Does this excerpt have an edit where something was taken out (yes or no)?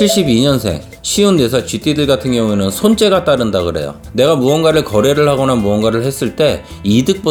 no